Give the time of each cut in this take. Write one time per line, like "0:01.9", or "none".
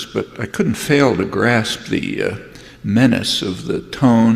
0:01.5